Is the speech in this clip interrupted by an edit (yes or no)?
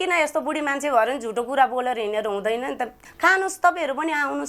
yes